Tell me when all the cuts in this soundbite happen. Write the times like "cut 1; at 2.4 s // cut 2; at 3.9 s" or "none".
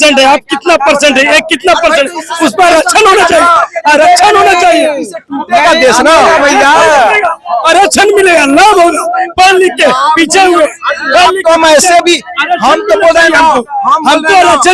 none